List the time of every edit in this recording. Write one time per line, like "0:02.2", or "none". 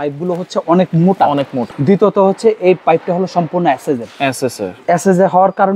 0:01.7